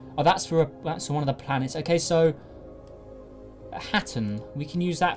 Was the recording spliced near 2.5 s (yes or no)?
no